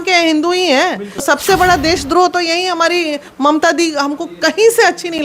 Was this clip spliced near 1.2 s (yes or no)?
yes